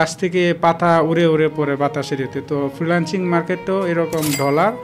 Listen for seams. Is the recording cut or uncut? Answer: uncut